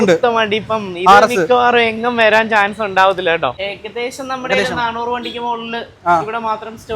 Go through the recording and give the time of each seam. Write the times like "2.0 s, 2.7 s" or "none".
3.5 s